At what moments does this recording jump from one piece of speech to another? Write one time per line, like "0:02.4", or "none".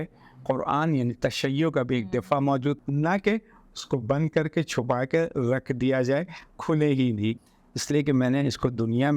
0:02.8
0:07.4